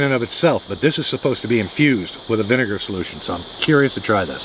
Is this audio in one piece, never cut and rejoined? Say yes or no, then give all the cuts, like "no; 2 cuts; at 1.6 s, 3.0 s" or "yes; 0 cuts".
yes; 0 cuts